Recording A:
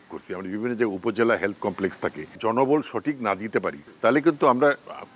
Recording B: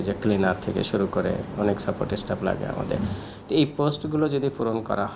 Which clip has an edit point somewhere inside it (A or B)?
A